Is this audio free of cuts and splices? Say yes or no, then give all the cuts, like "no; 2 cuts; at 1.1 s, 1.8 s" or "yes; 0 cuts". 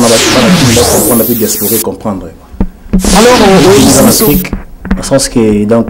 no; 1 cut; at 3.8 s